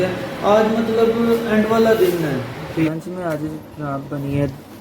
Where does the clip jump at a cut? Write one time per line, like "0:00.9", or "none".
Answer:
0:02.9